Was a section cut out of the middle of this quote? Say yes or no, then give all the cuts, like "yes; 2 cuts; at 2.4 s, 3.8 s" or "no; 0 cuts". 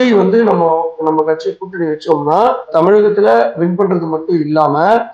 yes; 1 cut; at 0.9 s